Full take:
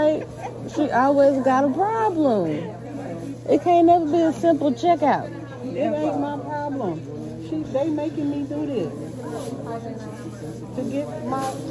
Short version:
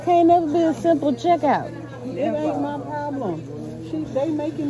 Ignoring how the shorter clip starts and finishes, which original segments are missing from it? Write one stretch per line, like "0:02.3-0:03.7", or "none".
none